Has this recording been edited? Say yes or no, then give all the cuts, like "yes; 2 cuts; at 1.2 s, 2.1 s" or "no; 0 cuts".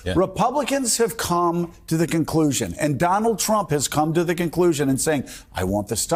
no; 0 cuts